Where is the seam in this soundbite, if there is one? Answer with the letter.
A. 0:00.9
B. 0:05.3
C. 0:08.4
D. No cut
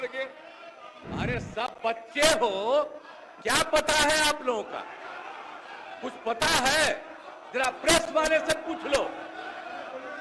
A